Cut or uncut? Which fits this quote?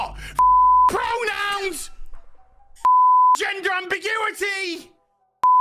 uncut